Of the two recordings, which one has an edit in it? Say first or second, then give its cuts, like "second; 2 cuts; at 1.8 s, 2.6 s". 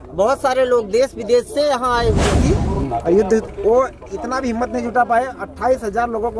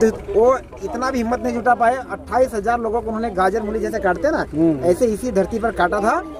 first; 1 cut; at 2.4 s